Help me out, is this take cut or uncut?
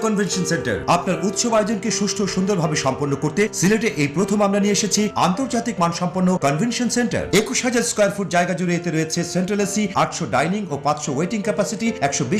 uncut